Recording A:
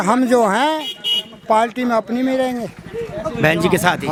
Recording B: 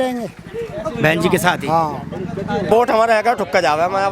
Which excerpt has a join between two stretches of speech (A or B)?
B